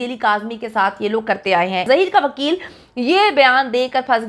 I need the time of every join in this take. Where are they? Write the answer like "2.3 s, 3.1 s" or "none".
1.8 s